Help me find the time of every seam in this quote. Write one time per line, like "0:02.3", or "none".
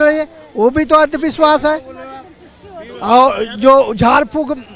none